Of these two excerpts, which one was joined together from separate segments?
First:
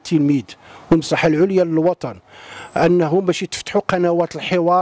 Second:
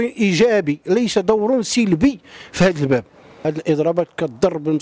second; 1 cut; at 3.5 s

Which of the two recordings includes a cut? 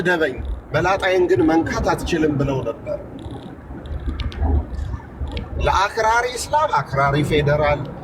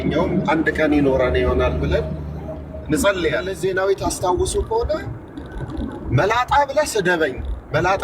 second; 1 cut; at 3.5 s

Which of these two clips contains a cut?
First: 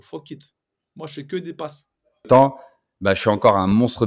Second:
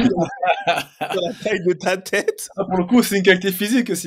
first; 1 cut; at 2.3 s

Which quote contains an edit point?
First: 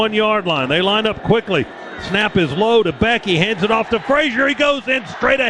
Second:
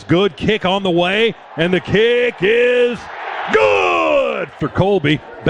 second; 1 cut; at 4.6 s

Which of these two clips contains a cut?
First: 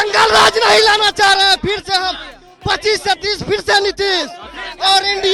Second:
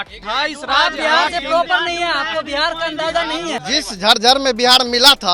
second; 1 cut; at 3.6 s

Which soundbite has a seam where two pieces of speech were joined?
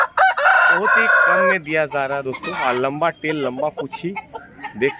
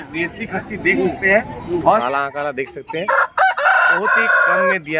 second; 1 cut; at 2.0 s

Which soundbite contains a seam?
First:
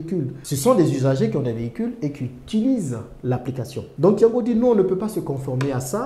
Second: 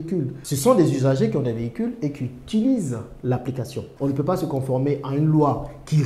second; 1 cut; at 3.9 s

